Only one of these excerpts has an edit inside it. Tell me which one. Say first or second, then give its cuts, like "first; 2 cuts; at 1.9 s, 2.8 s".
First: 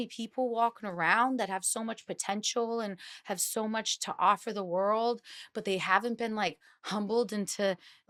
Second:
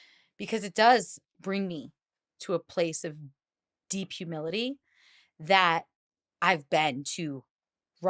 second; 1 cut; at 1.1 s